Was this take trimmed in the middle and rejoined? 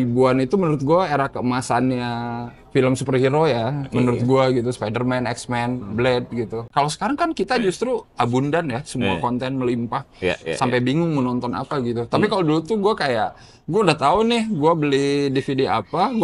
yes; 1 cut; at 6.7 s

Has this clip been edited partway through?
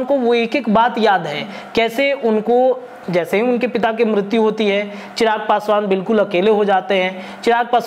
no; 0 cuts

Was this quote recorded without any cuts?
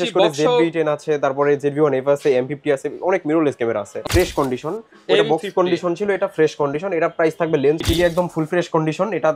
no; 2 cuts; at 4.0 s, 7.8 s

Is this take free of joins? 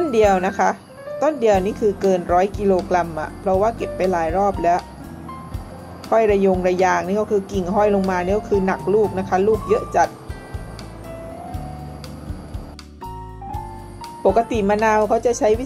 yes; 0 cuts

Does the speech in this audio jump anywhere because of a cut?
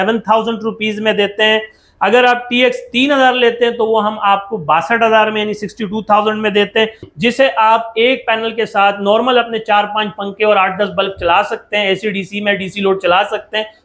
yes; 1 cut; at 7.1 s

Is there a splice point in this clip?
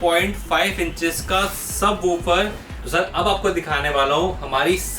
yes; 1 cut; at 2.8 s

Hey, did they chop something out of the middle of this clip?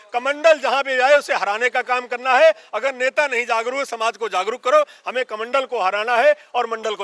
no; 0 cuts

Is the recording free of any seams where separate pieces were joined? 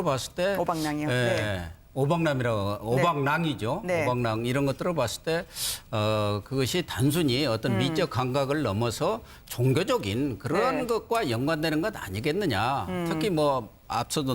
no; 1 cut; at 10.7 s

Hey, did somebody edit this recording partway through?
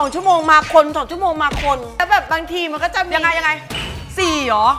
yes; 1 cut; at 2.0 s

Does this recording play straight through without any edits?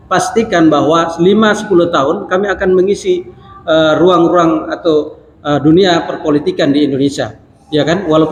yes; 0 cuts

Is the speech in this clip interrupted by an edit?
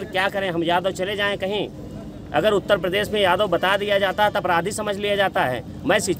no; 0 cuts

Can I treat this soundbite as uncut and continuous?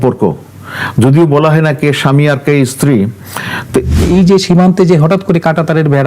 no; 1 cut; at 3.9 s

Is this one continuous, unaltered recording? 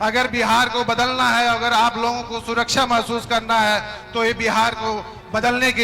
yes; 0 cuts

